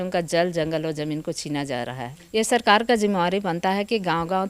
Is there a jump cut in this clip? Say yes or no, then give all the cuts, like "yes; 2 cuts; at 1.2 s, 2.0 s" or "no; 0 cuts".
yes; 1 cut; at 2.1 s